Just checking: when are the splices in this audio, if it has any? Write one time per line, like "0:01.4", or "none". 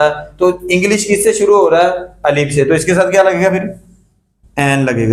none